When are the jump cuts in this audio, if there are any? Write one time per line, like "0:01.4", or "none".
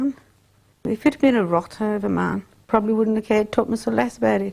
0:00.8
0:02.6